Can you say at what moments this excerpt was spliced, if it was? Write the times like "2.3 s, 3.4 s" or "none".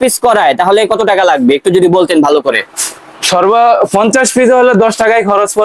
none